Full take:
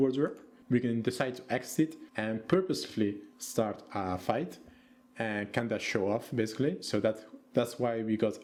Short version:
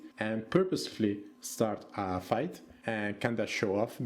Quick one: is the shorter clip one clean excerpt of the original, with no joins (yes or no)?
no